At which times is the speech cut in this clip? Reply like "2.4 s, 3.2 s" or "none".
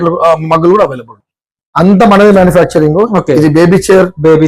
1.5 s

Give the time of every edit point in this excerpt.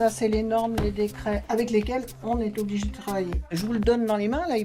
1.4 s

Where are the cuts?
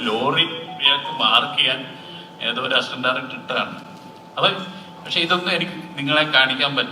none

